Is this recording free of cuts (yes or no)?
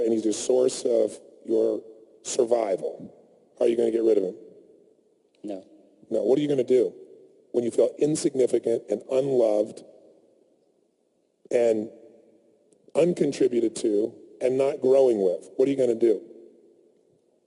yes